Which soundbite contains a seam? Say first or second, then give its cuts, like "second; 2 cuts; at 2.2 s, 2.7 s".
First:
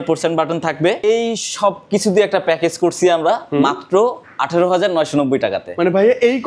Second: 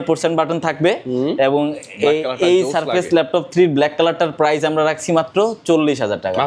first; 1 cut; at 1.0 s